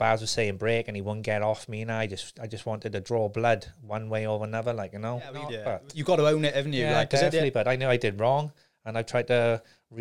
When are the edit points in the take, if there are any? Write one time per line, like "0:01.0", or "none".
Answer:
0:05.5